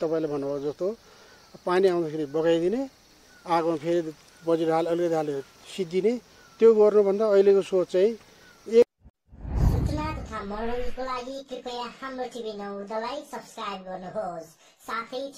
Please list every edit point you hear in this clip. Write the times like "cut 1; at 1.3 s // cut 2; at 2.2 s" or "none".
cut 1; at 9.2 s